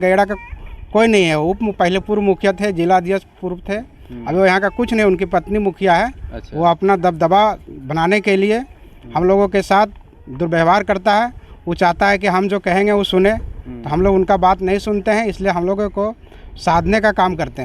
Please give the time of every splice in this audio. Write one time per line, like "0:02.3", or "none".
none